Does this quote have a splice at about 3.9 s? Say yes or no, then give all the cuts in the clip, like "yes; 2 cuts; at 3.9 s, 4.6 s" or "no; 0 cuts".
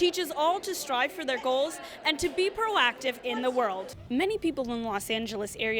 yes; 1 cut; at 3.9 s